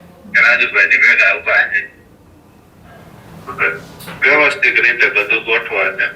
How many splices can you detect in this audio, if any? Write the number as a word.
one